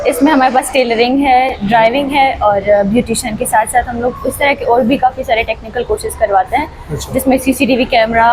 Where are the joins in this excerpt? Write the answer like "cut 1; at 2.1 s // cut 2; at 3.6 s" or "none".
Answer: none